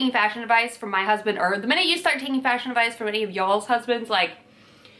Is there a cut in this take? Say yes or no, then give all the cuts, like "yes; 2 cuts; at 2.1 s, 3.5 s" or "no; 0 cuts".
no; 0 cuts